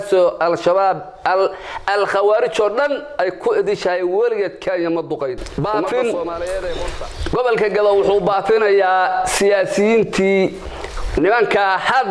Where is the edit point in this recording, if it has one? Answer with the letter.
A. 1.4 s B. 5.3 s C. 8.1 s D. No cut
B